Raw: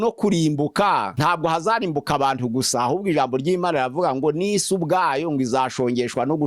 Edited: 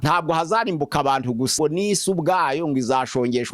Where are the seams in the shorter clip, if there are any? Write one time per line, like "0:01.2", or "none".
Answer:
0:01.5